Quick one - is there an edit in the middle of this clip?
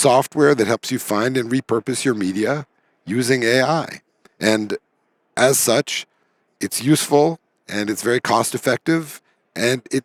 no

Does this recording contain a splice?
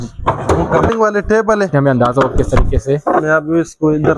yes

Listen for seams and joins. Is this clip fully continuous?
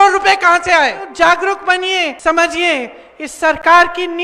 no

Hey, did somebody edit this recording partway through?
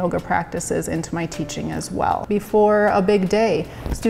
yes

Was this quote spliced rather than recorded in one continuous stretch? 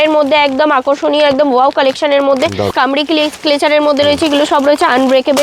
yes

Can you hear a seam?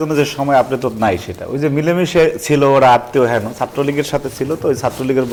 no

